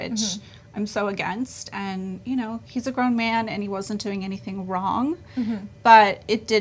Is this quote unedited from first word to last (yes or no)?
yes